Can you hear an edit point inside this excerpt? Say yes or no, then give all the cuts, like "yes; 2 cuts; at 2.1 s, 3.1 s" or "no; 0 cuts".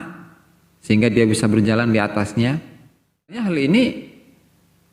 yes; 1 cut; at 3.4 s